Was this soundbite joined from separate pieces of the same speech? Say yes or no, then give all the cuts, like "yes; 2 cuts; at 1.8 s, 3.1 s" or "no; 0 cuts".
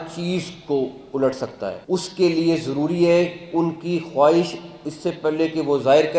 yes; 1 cut; at 1.8 s